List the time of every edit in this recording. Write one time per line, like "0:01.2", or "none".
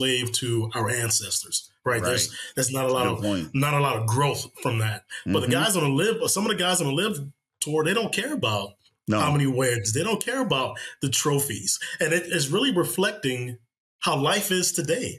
none